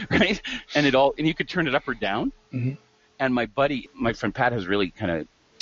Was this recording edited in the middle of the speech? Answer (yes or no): yes